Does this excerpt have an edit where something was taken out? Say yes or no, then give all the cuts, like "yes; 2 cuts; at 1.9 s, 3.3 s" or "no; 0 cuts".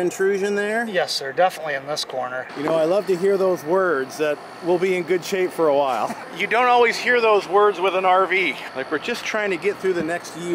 yes; 3 cuts; at 2.5 s, 6.2 s, 8.6 s